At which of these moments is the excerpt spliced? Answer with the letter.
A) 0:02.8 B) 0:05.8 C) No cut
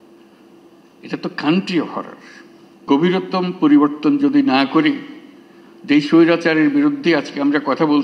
A